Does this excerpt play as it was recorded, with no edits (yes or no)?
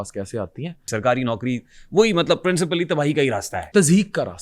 no